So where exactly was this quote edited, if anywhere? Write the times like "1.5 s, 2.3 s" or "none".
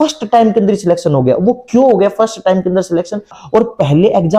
3.4 s